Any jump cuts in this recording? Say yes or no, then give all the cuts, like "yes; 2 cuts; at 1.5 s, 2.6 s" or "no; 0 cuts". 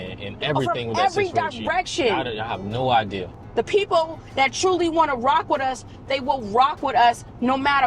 yes; 1 cut; at 3.2 s